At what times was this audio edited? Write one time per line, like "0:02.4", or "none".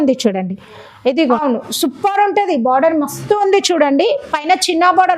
0:01.4

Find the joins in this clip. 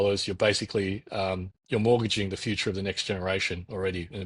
none

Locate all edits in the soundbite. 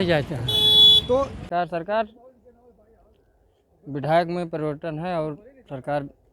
0:01.4

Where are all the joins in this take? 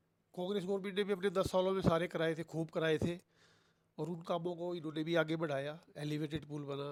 none

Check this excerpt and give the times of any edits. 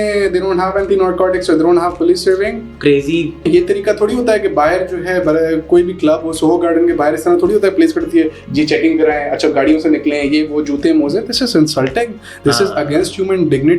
0:03.4

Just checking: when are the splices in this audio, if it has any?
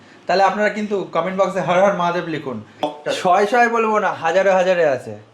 0:02.8

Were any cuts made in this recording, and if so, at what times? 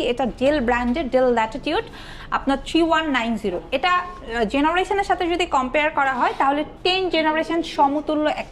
none

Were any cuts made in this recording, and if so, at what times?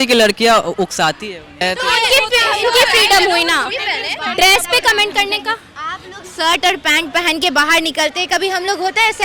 0:01.6

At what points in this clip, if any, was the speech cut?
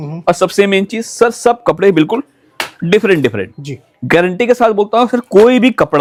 none

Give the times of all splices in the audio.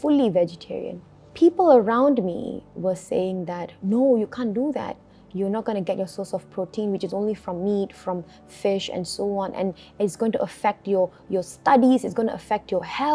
0:01.2

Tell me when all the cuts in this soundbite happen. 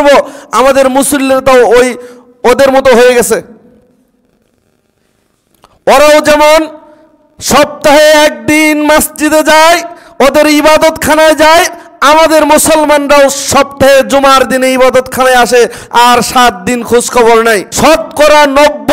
0:17.7

